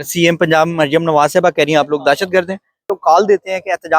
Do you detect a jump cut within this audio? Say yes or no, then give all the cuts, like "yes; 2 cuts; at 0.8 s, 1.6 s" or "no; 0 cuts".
yes; 1 cut; at 2.9 s